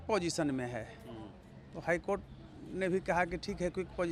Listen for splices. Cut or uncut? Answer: uncut